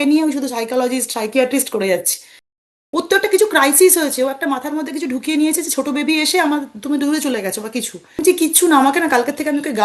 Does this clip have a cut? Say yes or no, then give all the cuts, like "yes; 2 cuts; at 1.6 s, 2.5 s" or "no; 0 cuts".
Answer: yes; 2 cuts; at 2.6 s, 8.2 s